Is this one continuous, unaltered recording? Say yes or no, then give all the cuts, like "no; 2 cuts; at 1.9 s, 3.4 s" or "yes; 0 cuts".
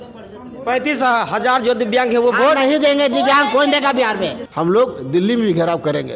no; 1 cut; at 4.4 s